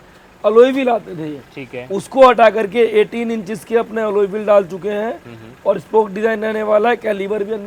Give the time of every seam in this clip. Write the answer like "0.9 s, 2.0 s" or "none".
none